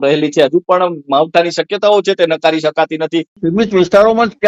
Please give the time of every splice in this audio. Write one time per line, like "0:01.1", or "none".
0:03.4